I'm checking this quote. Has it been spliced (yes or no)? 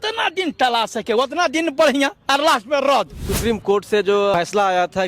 yes